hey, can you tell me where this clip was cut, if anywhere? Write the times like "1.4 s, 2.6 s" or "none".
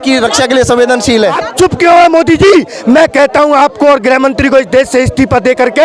1.4 s